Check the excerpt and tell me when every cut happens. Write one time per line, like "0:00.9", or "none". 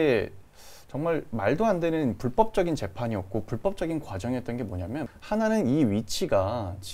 0:05.1